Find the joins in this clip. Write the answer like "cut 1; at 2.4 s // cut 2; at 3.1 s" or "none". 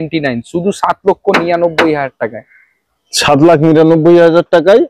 none